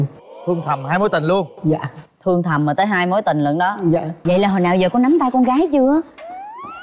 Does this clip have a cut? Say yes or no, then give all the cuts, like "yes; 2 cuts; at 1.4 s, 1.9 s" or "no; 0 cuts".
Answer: yes; 1 cut; at 4.1 s